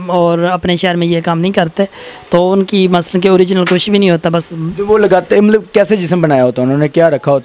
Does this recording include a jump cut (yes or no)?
no